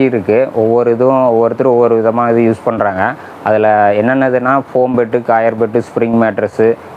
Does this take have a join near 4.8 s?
no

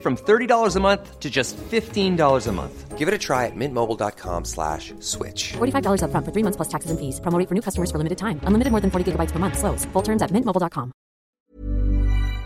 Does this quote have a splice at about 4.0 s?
no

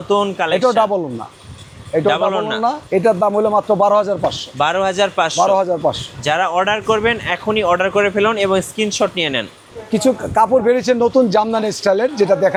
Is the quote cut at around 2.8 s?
no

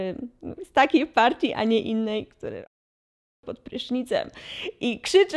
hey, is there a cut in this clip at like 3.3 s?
no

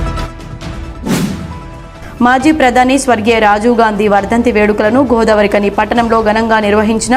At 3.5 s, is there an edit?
no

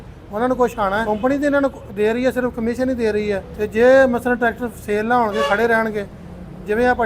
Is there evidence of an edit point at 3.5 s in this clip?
yes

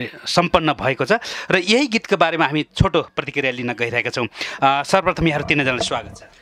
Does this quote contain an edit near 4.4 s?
no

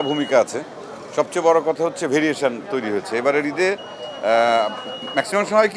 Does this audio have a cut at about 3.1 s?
no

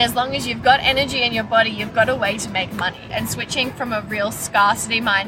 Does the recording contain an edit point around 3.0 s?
yes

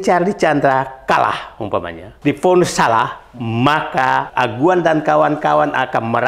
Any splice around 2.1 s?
yes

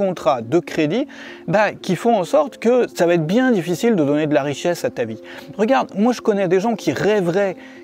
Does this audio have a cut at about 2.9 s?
yes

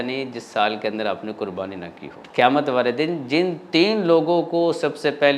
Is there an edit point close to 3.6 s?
no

